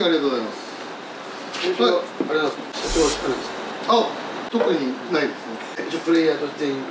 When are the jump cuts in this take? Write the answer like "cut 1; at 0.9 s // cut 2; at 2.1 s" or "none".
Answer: none